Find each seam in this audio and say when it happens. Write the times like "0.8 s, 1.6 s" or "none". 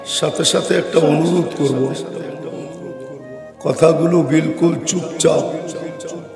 none